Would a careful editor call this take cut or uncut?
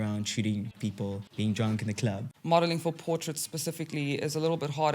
cut